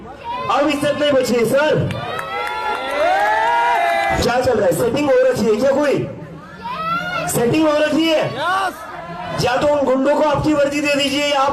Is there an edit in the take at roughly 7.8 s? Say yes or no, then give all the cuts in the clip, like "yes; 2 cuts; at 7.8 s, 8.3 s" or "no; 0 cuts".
no; 2 cuts; at 4.2 s, 9.2 s